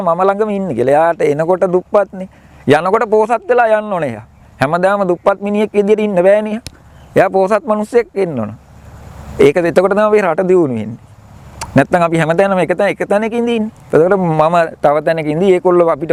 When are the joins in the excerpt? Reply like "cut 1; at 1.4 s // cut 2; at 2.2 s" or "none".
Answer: none

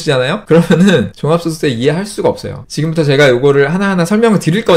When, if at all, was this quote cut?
cut 1; at 2.7 s

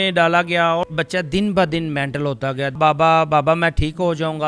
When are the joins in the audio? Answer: cut 1; at 0.9 s // cut 2; at 2.8 s

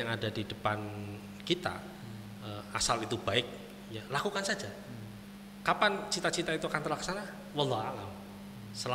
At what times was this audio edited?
none

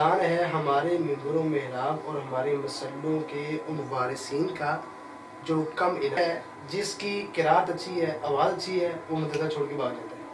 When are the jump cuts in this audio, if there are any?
cut 1; at 6.2 s

